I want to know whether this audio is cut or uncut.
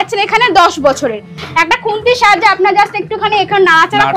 cut